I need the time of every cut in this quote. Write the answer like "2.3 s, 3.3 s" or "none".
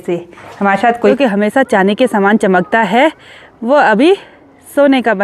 1.1 s